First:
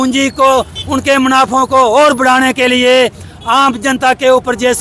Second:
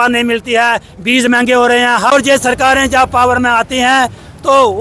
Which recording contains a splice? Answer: second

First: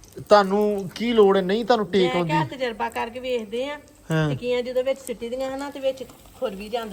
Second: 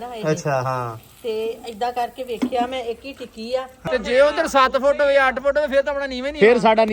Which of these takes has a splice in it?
second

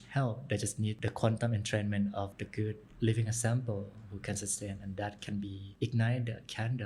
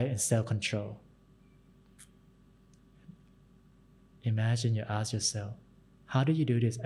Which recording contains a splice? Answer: first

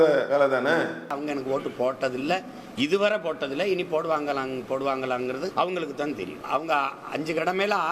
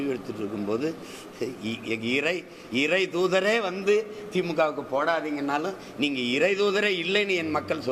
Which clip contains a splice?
first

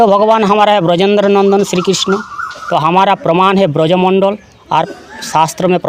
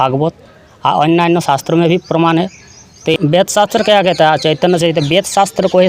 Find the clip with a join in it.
second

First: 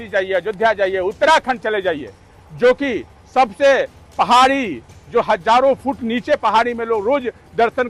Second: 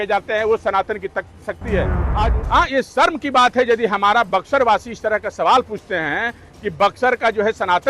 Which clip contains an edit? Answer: second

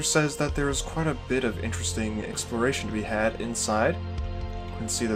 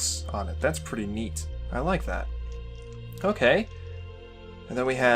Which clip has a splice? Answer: second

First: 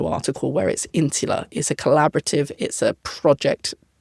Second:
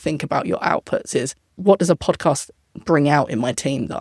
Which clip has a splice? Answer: second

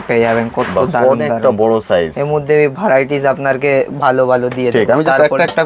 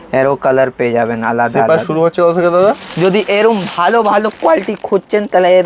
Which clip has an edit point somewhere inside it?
second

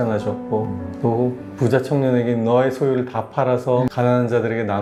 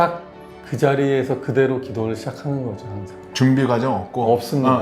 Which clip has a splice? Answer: second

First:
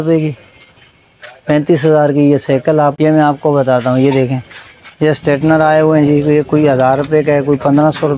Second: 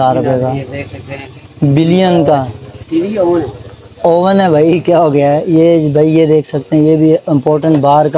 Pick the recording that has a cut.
first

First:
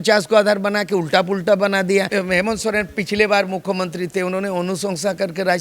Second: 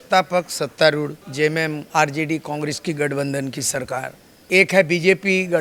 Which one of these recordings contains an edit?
first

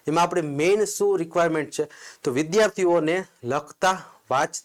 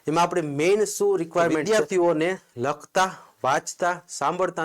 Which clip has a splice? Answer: second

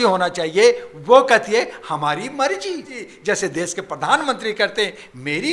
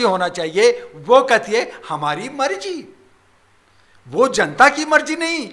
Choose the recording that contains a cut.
first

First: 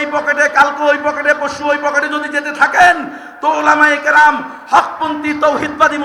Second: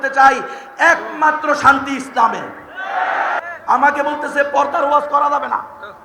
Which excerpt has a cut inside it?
second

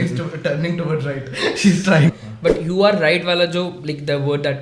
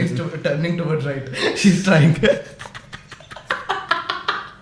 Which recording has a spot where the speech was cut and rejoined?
first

